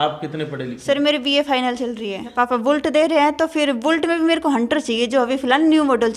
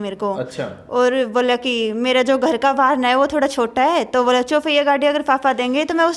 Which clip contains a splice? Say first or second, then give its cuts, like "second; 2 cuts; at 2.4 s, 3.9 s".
first; 1 cut; at 2.3 s